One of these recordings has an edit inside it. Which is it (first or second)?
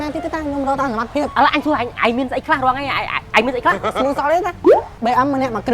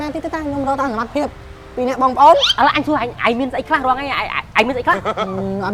first